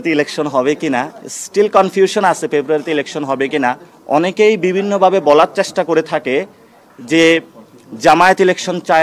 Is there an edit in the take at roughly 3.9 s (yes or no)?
yes